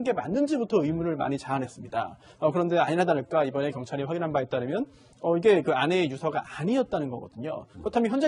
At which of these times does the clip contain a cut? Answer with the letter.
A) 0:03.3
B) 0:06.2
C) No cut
A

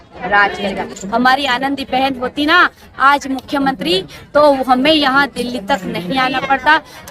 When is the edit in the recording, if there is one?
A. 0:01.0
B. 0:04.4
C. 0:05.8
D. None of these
A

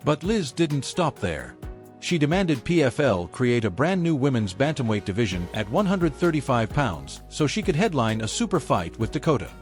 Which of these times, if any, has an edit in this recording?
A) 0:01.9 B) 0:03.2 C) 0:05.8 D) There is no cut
B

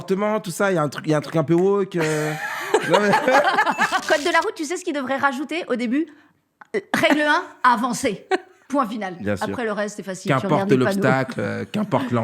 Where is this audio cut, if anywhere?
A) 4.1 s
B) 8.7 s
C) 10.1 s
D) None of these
A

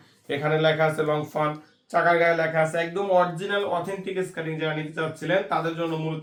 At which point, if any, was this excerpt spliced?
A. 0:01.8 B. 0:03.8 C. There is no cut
C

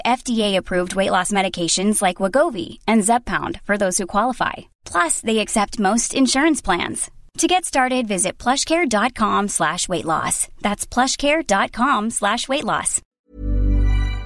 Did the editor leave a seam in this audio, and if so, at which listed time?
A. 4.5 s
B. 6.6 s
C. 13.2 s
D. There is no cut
C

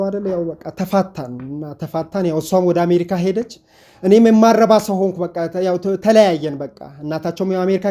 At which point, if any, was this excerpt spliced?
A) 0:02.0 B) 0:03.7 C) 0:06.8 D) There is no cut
D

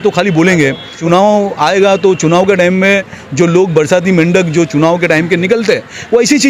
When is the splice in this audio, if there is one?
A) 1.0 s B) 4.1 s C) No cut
A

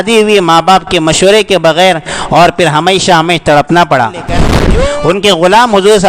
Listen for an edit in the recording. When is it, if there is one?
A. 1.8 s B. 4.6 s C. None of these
B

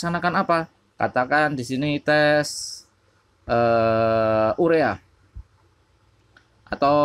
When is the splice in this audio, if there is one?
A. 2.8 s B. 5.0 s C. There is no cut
C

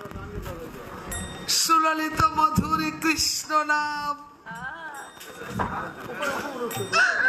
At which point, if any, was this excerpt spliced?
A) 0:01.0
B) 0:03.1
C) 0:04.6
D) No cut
D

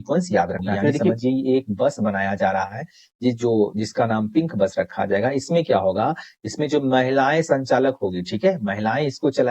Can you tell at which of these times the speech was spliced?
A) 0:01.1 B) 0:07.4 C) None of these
A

